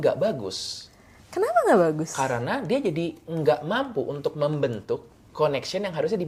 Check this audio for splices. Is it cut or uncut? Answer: uncut